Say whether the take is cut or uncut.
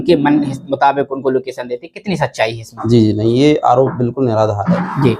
uncut